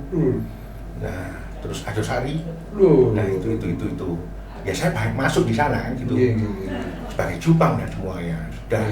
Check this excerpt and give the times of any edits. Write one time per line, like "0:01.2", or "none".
none